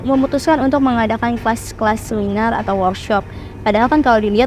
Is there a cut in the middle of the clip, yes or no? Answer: no